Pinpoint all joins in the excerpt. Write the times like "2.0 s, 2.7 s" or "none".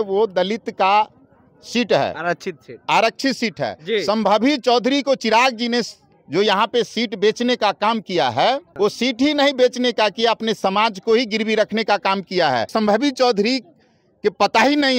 8.7 s, 12.7 s